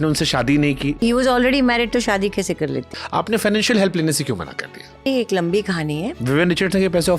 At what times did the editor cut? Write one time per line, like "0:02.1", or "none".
0:01.0
0:03.0
0:05.1
0:06.2

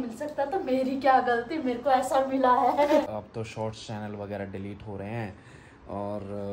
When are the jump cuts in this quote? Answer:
0:03.1

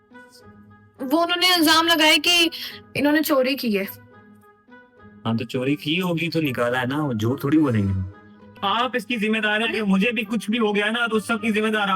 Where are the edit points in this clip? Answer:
0:08.5

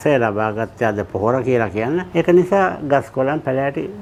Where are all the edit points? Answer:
none

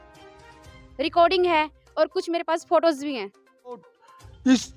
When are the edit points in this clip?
0:03.9

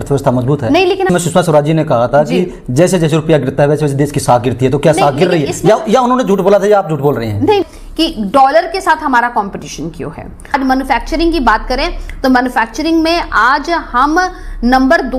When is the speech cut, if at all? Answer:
0:01.1
0:07.6
0:10.5

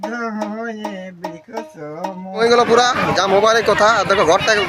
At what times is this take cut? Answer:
0:02.4

